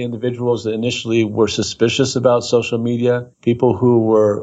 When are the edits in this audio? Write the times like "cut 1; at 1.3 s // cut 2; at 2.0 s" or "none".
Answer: cut 1; at 3.3 s